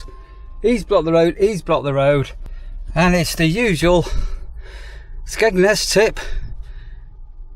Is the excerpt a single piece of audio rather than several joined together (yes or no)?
yes